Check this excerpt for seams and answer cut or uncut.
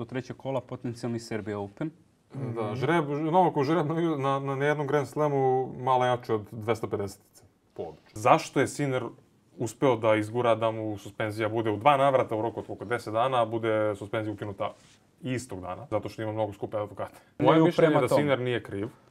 cut